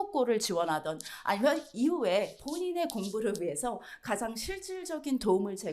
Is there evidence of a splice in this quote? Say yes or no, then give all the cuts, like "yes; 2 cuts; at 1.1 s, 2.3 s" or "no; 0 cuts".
no; 0 cuts